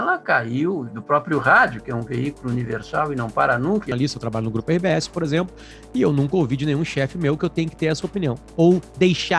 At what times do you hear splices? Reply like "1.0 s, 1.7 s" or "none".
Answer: 3.9 s

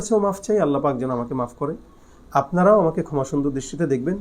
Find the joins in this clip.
none

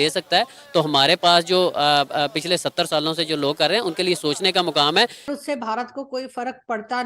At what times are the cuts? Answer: 5.3 s

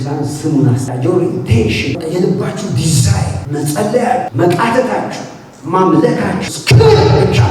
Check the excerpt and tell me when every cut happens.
0.9 s, 2.0 s, 3.4 s, 4.3 s, 6.5 s

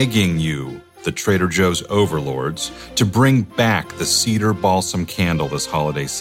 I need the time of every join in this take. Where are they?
none

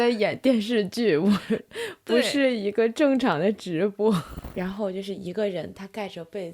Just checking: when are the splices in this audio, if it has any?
4.4 s

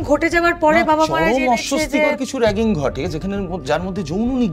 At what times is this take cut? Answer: none

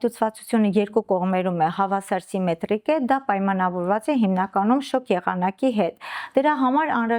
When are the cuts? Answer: none

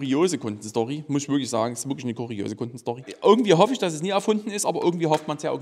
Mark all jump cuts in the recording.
3.1 s

